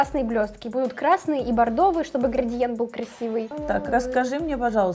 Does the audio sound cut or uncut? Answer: cut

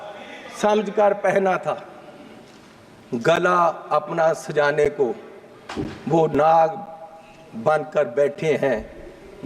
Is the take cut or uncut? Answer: uncut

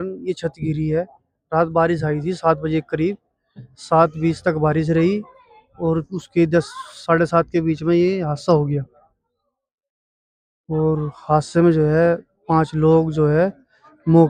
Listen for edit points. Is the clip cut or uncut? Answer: uncut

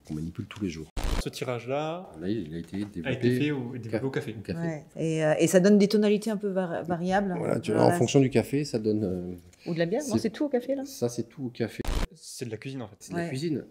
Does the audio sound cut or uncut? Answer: cut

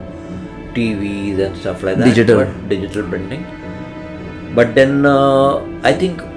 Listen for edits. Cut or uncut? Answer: uncut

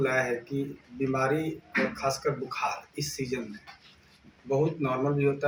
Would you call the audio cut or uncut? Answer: uncut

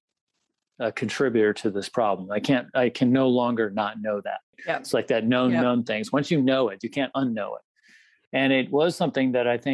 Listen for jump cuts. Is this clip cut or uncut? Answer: uncut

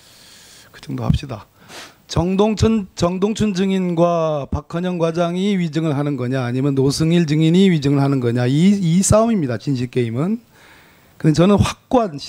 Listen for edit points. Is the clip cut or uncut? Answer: uncut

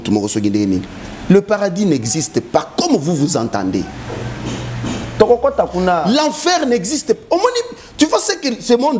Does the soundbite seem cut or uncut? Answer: uncut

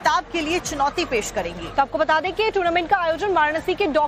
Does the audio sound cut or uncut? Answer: uncut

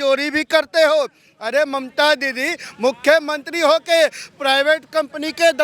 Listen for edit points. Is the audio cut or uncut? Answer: uncut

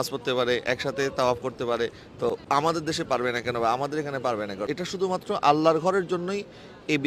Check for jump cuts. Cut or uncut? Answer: cut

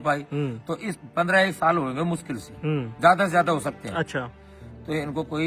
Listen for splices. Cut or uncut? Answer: cut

